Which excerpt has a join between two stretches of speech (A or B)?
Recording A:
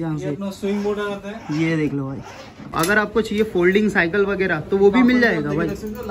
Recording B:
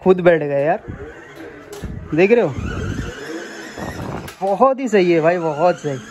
A